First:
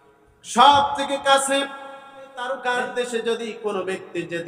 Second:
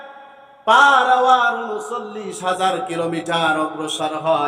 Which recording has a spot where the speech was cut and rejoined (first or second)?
first